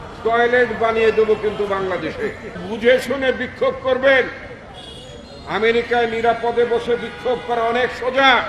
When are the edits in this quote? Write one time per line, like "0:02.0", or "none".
0:02.6